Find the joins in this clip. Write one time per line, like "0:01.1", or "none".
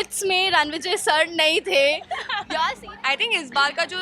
0:02.8